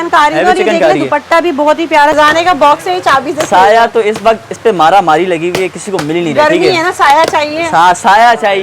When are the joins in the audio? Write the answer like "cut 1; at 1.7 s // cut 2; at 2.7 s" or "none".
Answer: cut 1; at 2.1 s